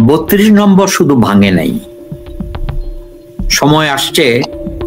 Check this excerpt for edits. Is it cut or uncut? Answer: cut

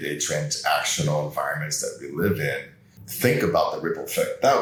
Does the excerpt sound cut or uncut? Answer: uncut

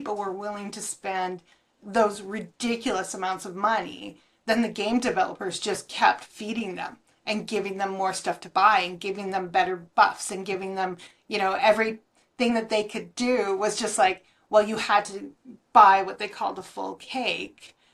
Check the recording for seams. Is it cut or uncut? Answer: uncut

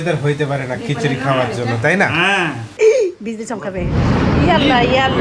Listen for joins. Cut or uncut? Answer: cut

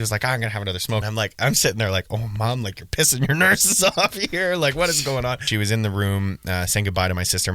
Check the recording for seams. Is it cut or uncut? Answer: cut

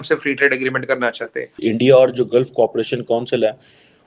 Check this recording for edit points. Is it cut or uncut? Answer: cut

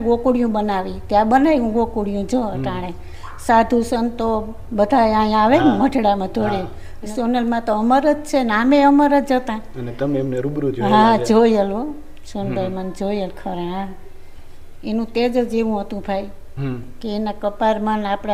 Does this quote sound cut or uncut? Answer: uncut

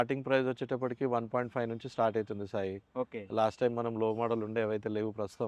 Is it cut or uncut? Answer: uncut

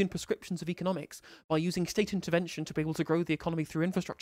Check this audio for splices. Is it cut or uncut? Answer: uncut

